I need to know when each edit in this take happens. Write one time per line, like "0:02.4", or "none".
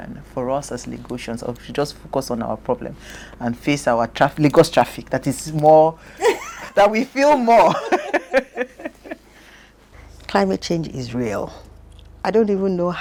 none